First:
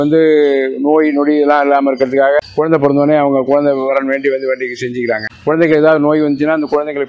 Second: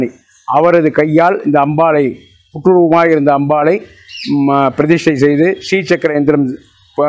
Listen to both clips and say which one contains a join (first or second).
first